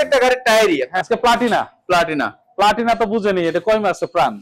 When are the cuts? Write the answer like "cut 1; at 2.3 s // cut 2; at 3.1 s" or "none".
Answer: cut 1; at 0.9 s